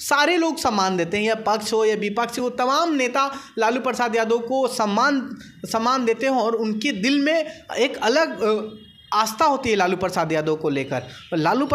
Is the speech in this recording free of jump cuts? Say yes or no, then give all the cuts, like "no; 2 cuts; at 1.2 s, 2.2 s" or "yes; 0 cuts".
yes; 0 cuts